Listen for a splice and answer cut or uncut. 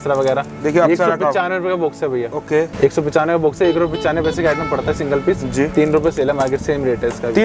cut